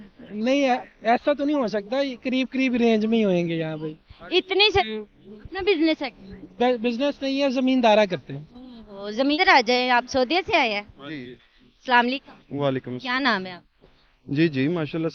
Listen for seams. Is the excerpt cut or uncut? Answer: cut